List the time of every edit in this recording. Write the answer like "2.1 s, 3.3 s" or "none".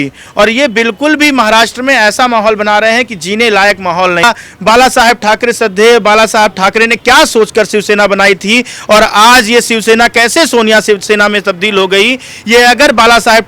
4.2 s